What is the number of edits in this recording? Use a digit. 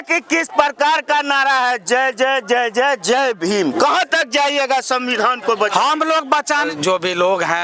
1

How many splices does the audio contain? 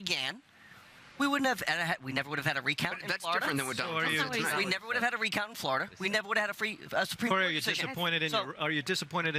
1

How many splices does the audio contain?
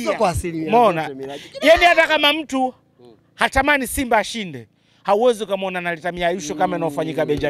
0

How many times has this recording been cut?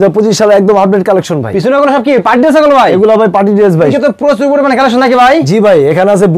1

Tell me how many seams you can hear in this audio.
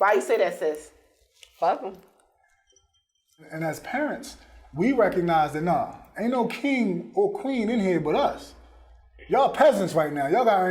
1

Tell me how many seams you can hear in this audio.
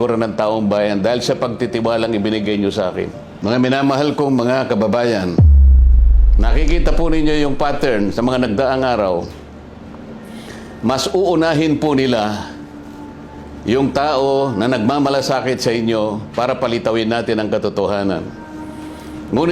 1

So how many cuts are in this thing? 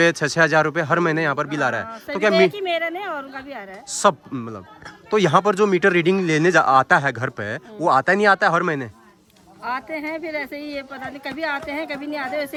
0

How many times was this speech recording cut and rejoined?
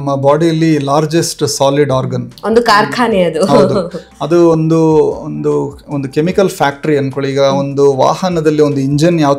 0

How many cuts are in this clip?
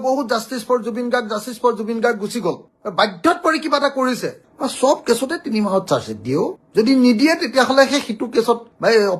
1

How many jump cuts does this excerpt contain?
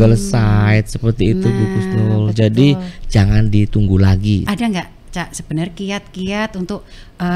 1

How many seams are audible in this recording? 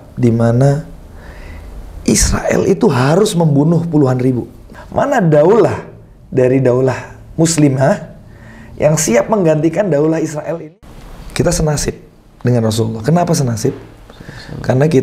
2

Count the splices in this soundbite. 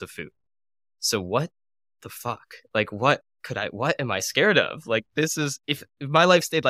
0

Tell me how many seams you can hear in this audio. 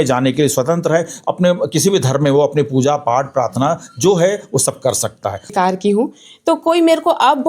1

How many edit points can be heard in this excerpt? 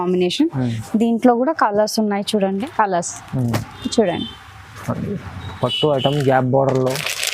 1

